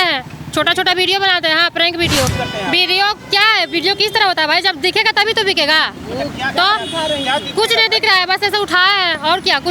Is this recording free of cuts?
no; 1 cut; at 2.3 s

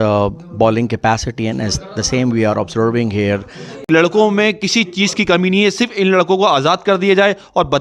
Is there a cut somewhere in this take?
yes; 1 cut; at 3.8 s

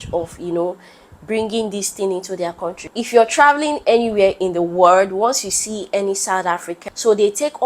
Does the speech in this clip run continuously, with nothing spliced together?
no; 2 cuts; at 2.8 s, 6.7 s

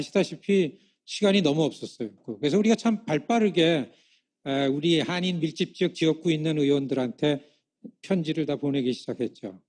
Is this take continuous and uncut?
no; 1 cut; at 6.0 s

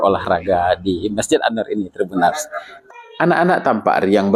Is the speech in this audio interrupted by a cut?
no; 0 cuts

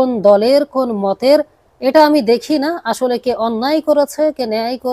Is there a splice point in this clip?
no; 0 cuts

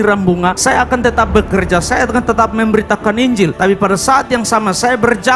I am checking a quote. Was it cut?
no; 0 cuts

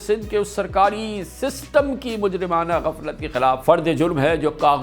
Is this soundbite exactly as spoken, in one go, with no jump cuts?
no; 1 cut; at 3.6 s

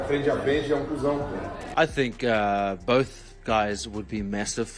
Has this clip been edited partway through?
yes; 1 cut; at 1.6 s

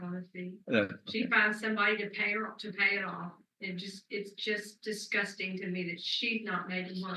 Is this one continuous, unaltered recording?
yes; 0 cuts

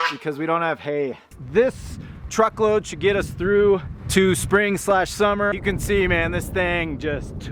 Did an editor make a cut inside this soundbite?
yes; 3 cuts; at 1.3 s, 4.0 s, 5.6 s

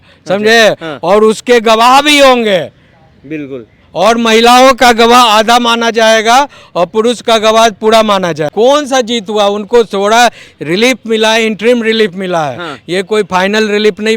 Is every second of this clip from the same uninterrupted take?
no; 1 cut; at 8.5 s

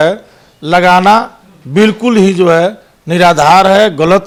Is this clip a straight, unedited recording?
yes; 0 cuts

